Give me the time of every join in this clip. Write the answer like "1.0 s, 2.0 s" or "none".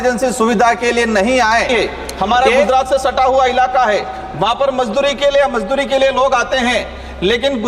1.7 s